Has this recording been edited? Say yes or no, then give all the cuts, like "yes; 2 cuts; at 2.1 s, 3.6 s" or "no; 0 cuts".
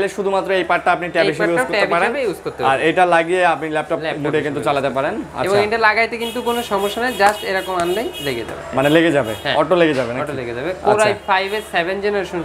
no; 0 cuts